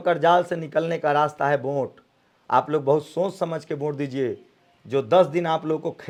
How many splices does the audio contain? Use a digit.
0